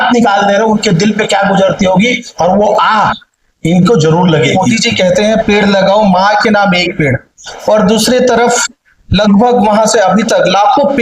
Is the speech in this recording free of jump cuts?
no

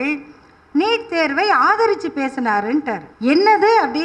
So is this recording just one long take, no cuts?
no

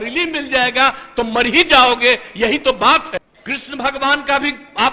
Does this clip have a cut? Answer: yes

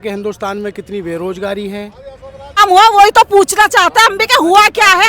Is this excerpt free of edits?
no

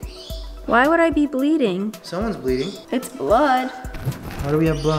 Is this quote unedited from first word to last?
no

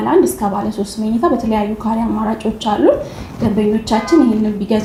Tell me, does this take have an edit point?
no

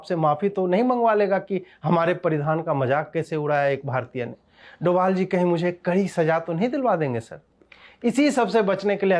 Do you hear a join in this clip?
no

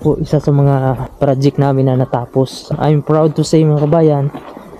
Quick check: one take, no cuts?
no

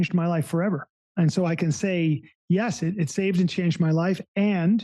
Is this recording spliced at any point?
yes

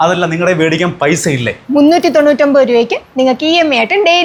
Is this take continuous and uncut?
yes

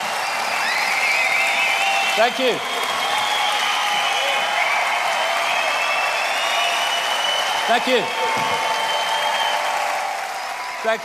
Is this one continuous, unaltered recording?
yes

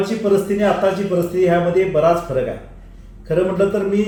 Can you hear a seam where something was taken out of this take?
no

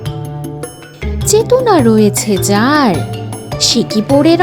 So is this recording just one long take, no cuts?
no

